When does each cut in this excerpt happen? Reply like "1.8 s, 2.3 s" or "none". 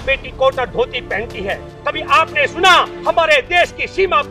1.7 s